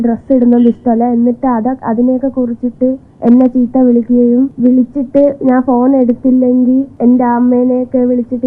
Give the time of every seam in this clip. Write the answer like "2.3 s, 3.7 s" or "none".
3.1 s, 4.5 s, 6.9 s